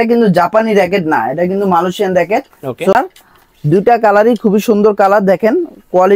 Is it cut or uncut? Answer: cut